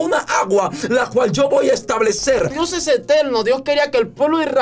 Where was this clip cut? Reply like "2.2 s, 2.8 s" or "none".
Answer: 2.5 s